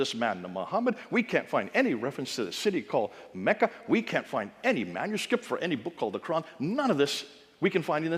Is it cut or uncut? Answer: uncut